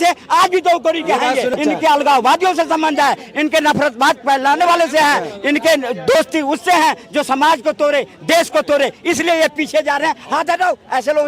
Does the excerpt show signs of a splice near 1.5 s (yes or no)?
yes